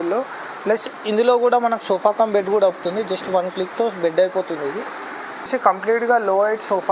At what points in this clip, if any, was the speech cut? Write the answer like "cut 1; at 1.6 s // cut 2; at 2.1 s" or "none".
cut 1; at 5.5 s